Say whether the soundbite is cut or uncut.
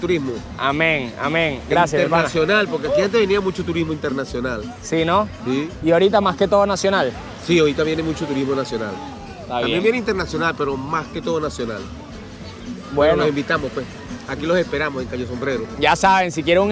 uncut